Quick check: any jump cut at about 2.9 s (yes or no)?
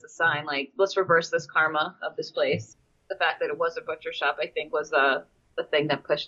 no